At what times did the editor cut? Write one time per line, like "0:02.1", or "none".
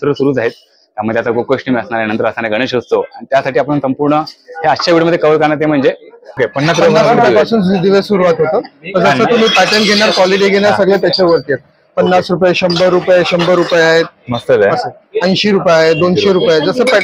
0:06.3